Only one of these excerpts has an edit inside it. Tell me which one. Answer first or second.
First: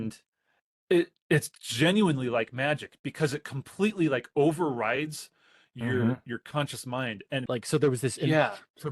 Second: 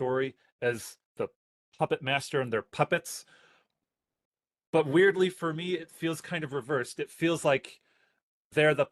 first